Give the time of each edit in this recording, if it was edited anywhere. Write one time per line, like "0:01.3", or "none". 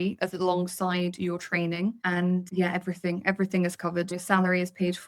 0:02.3
0:04.1